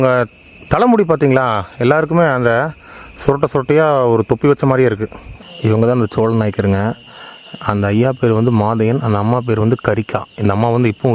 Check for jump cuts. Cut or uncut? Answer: cut